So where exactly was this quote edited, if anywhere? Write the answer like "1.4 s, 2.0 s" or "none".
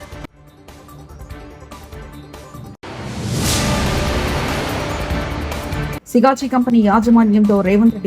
5.9 s